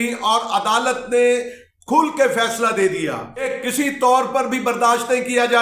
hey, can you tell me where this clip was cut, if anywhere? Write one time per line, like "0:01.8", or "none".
0:03.5